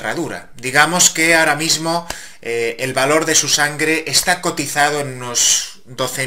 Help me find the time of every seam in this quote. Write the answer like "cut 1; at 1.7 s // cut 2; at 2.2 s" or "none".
cut 1; at 2.3 s